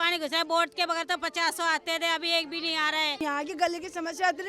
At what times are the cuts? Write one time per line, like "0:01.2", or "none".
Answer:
0:03.2